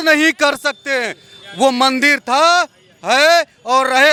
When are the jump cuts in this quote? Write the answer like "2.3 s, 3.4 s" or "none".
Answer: none